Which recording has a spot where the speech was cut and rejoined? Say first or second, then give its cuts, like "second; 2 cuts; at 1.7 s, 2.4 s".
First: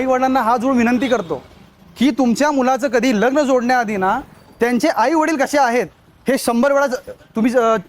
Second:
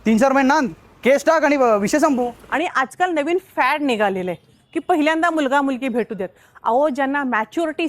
second; 1 cut; at 2.4 s